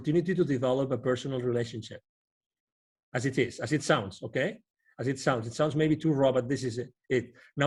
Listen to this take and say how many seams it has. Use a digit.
0